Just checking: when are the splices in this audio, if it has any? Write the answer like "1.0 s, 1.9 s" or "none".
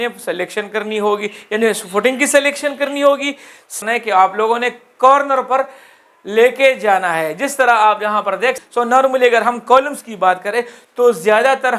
3.8 s, 8.6 s